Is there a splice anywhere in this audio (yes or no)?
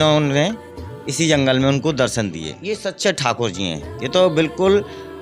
yes